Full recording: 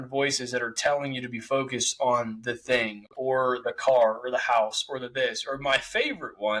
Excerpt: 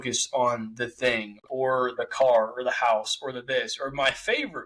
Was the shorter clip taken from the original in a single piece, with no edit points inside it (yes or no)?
yes